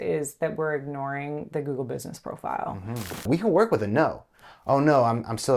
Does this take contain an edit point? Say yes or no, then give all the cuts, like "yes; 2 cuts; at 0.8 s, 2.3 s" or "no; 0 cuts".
yes; 1 cut; at 3.2 s